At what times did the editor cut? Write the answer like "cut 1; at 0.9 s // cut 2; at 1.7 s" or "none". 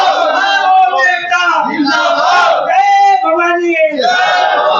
none